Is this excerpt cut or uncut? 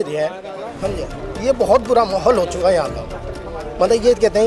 uncut